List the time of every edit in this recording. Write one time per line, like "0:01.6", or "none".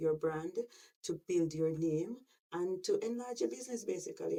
none